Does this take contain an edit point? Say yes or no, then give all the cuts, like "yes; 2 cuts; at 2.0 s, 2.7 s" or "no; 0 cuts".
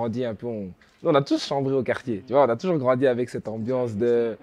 no; 0 cuts